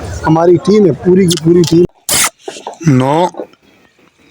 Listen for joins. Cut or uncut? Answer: cut